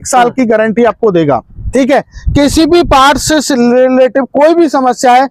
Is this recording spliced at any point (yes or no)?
no